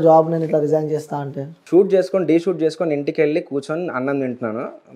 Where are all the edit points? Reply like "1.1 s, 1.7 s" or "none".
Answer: 1.6 s

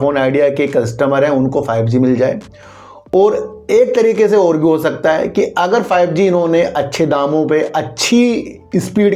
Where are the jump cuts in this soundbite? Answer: none

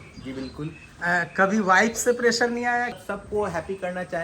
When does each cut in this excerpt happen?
3.0 s

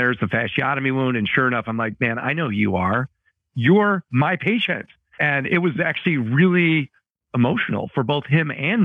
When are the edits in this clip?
4.1 s, 5.1 s

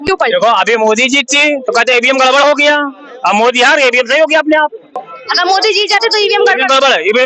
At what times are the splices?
5.1 s

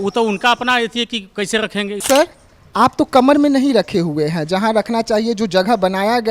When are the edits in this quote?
2.0 s

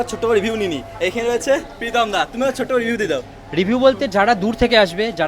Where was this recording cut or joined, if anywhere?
none

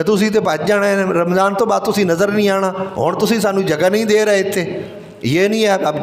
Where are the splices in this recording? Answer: none

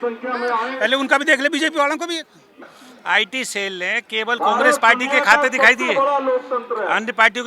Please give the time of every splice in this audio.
2.6 s

